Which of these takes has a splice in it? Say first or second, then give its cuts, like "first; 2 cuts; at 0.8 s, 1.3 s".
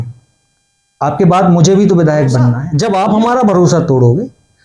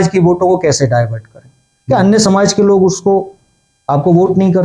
first; 1 cut; at 2.7 s